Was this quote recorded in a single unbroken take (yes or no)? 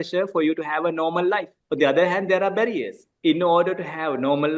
no